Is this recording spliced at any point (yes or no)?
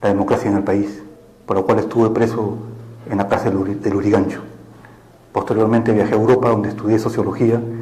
yes